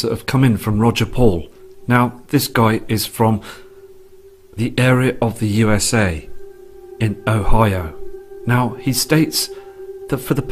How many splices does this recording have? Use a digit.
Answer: 0